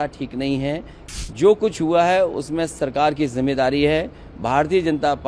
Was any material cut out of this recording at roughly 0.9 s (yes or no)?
yes